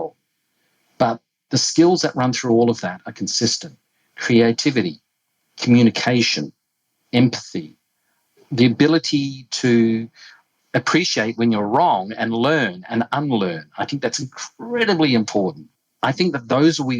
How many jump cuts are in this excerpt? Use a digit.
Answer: 2